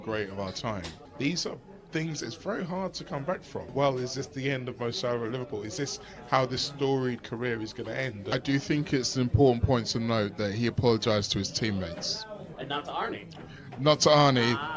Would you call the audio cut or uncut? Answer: cut